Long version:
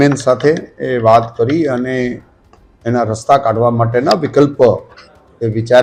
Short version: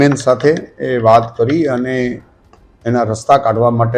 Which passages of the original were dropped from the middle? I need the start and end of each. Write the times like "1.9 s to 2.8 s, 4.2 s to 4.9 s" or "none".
none